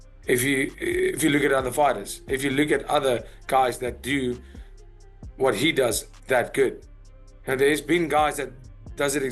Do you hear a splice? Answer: no; 0 cuts

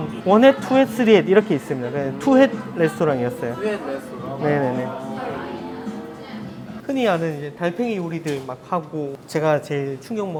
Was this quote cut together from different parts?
no; 0 cuts

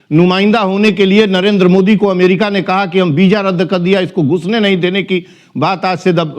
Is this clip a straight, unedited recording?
yes; 0 cuts

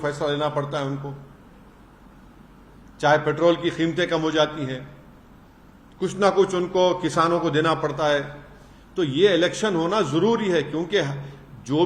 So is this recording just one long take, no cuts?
yes; 0 cuts

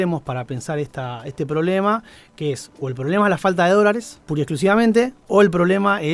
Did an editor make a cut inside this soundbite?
yes; 2 cuts; at 4.2 s, 5.2 s

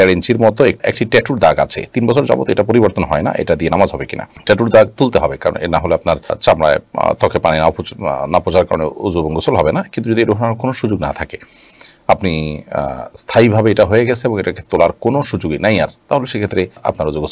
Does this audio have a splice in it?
no; 0 cuts

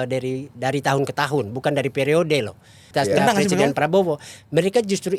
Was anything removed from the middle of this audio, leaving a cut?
yes; 1 cut; at 2.9 s

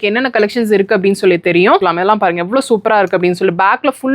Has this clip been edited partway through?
yes; 1 cut; at 1.8 s

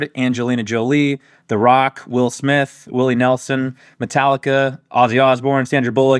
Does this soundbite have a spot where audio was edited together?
no; 0 cuts

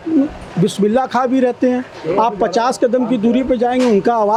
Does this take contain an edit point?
no; 0 cuts

